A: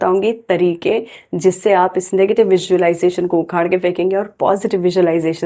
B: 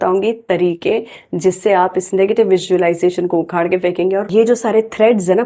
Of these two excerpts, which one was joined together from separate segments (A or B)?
B